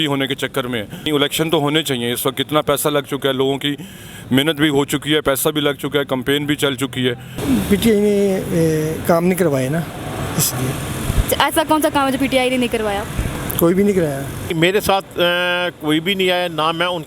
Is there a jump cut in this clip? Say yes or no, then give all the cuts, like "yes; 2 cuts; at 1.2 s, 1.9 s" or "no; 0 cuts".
yes; 3 cuts; at 1.1 s, 7.3 s, 14.5 s